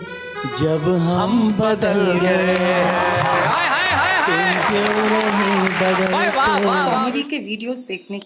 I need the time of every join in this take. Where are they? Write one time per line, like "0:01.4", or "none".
0:07.0